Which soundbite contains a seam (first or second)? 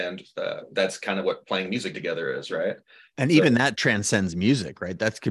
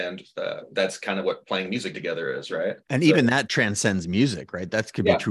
second